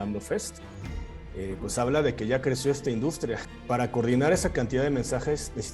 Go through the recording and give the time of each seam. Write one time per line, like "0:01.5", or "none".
0:03.4